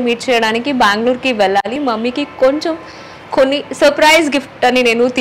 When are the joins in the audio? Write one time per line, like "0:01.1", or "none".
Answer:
0:01.7